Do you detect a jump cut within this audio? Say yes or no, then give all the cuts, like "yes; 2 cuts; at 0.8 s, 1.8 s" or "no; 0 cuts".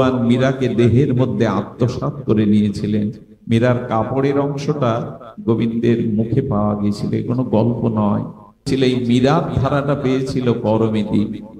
yes; 1 cut; at 8.7 s